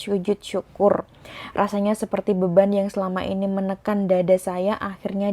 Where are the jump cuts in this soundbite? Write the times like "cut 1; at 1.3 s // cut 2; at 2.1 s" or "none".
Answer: none